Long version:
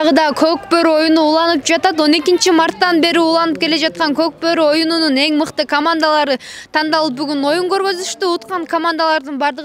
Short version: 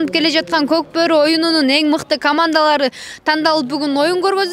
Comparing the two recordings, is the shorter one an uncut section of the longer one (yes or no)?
yes